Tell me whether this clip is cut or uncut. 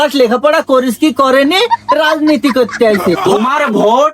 cut